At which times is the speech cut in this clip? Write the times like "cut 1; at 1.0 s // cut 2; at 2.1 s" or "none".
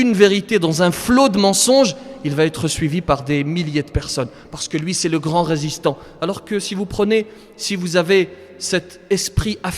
none